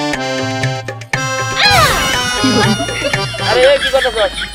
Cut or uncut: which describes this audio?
uncut